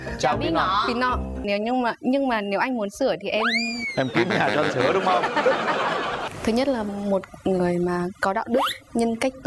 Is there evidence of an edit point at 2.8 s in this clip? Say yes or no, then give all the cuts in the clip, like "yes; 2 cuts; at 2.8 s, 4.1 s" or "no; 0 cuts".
no; 2 cuts; at 1.4 s, 6.2 s